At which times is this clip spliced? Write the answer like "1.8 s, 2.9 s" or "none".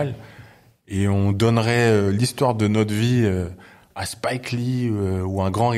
none